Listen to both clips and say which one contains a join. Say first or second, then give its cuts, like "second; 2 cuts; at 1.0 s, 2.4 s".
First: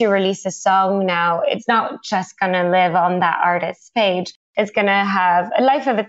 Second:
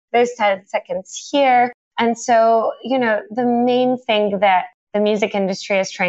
first; 1 cut; at 1.6 s